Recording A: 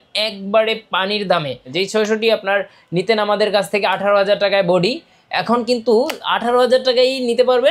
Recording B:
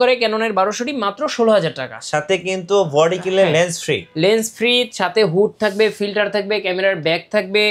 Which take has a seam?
A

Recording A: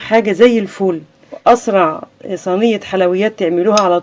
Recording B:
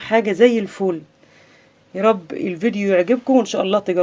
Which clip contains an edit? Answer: A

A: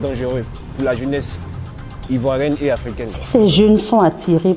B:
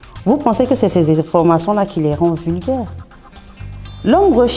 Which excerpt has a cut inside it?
A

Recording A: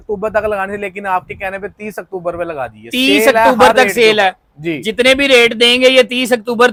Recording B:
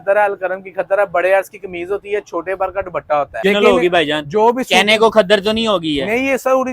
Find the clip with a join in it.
B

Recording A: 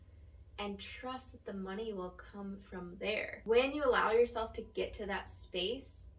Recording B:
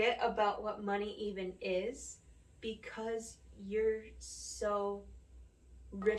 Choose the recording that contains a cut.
A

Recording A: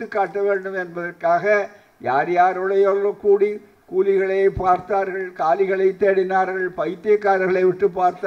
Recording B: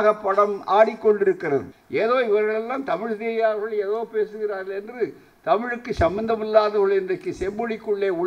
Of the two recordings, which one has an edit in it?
B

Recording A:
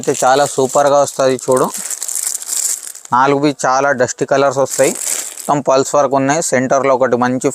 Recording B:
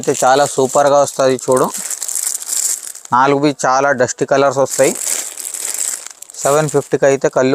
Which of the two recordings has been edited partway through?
A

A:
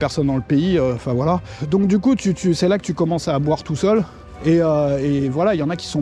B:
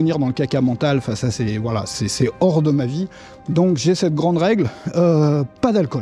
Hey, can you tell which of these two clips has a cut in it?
A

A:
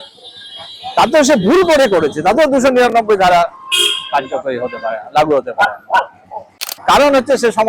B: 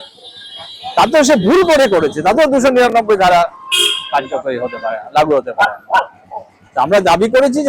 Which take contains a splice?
A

